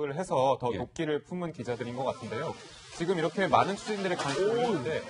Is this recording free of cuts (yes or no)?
no